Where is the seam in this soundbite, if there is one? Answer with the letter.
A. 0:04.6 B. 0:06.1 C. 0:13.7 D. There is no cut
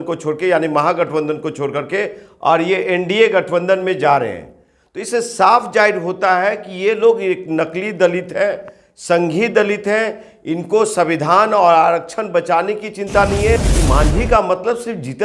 C